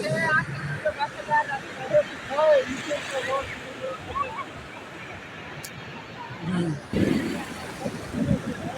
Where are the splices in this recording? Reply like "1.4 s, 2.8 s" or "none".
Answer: 6.9 s